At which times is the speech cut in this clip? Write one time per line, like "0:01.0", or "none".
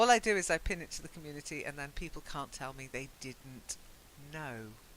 0:02.7